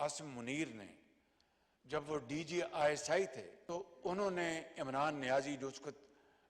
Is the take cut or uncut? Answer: cut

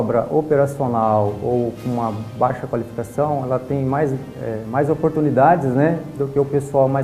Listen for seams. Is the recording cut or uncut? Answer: uncut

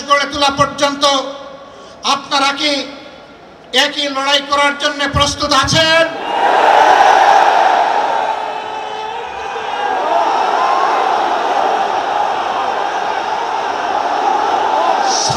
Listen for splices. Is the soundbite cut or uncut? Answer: uncut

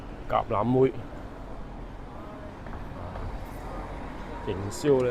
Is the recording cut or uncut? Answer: uncut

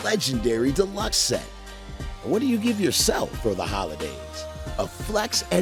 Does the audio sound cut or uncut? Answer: uncut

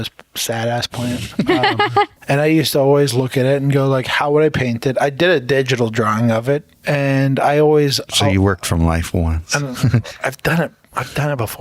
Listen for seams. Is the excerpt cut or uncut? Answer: cut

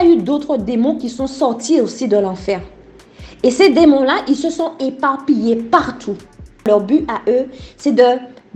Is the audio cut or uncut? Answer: cut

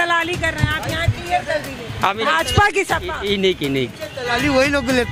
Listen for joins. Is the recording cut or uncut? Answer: uncut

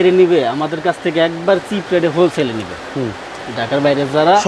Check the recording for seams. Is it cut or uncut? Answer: uncut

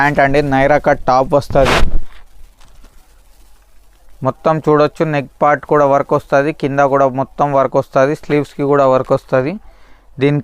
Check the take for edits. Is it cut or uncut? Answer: uncut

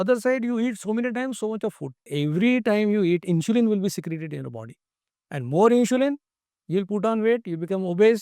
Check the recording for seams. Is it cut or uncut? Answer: cut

